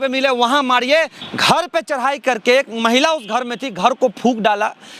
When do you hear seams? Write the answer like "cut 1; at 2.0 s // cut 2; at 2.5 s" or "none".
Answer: cut 1; at 1.2 s